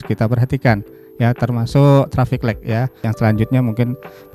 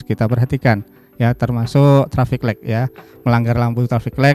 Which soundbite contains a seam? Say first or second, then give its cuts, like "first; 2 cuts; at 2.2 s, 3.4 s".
first; 1 cut; at 3.1 s